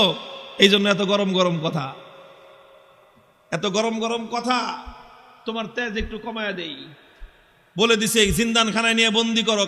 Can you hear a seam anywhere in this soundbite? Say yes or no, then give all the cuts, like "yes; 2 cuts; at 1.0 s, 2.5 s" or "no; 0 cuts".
no; 0 cuts